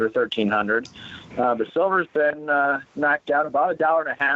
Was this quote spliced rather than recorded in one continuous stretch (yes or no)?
yes